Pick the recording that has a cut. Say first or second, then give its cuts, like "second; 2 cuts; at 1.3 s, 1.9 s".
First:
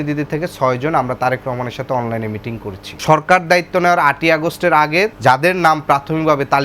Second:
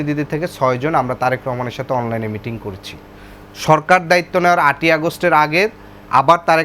first; 2 cuts; at 2.9 s, 5.2 s